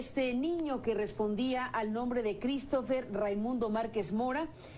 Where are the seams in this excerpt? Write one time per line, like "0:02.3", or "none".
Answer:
0:01.5

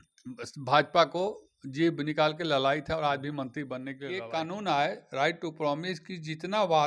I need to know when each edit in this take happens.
0:04.1

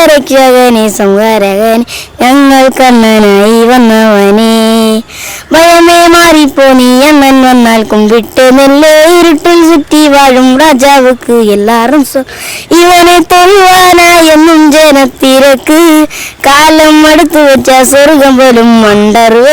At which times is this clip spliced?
none

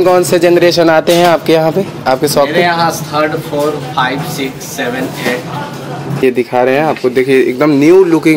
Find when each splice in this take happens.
0:06.2

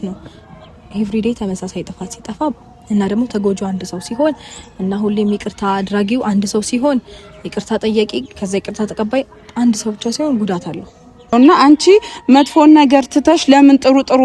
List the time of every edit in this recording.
0:11.3

